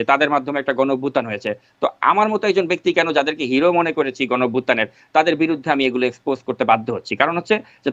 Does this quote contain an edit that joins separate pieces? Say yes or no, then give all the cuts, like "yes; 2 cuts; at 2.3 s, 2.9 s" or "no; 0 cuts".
no; 0 cuts